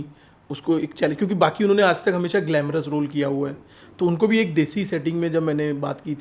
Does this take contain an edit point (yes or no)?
no